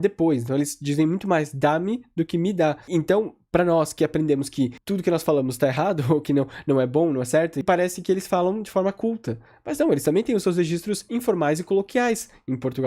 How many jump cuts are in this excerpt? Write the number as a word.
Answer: one